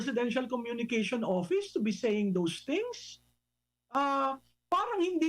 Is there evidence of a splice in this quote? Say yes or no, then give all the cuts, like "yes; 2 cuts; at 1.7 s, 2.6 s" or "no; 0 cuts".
no; 0 cuts